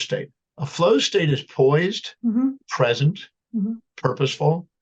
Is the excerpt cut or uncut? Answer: uncut